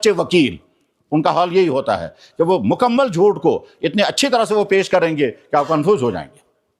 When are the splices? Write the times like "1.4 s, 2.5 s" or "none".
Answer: none